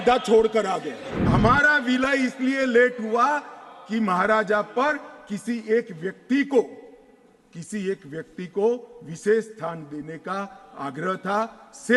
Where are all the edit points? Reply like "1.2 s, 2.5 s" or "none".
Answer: 1.1 s

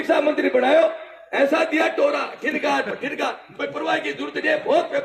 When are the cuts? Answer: none

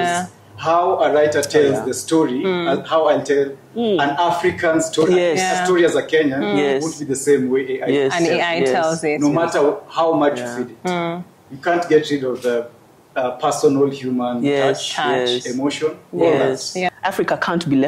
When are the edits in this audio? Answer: 16.9 s

